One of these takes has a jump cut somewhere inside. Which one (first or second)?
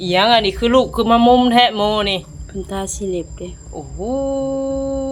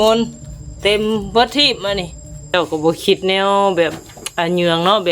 second